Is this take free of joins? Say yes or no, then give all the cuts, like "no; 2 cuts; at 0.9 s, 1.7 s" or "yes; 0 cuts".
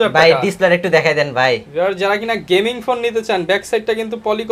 yes; 0 cuts